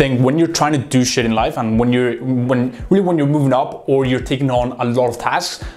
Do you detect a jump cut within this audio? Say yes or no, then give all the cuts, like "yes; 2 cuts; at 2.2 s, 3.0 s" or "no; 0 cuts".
no; 0 cuts